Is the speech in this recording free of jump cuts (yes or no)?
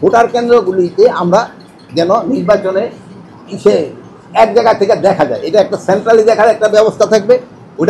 yes